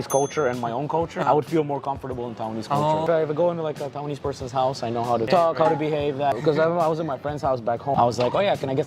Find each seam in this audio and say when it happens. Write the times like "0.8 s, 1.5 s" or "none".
1.2 s, 3.0 s, 5.3 s, 6.4 s, 8.0 s